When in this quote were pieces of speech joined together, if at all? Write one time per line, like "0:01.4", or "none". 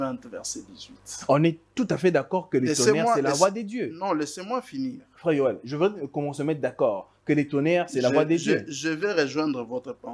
none